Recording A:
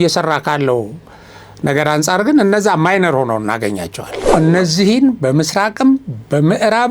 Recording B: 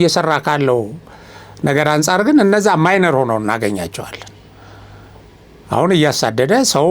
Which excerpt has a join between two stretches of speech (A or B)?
A